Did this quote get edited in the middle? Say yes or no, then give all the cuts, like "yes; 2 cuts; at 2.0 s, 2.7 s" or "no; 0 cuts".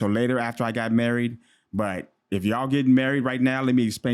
no; 0 cuts